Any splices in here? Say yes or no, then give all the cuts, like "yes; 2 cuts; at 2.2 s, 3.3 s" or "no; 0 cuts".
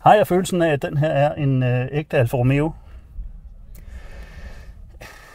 no; 0 cuts